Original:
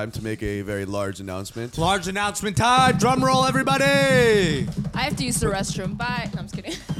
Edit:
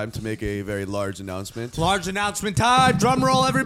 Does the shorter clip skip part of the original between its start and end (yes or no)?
no